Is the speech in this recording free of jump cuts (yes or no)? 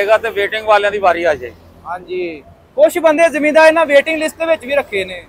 yes